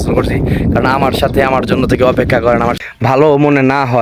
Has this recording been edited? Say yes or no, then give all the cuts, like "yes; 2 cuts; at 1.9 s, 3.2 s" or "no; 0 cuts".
yes; 1 cut; at 2.8 s